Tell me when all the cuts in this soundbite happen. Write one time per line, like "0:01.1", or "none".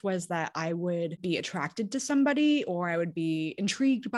0:01.2